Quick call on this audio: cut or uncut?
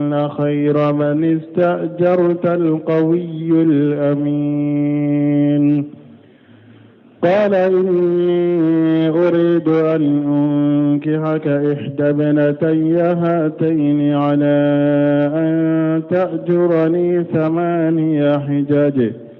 uncut